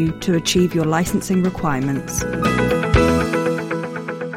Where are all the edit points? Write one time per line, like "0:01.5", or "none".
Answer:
0:02.2